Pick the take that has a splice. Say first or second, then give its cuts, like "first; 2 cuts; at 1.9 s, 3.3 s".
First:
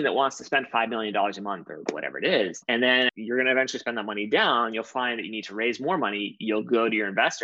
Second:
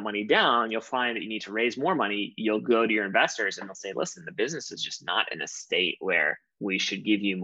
first; 1 cut; at 3.1 s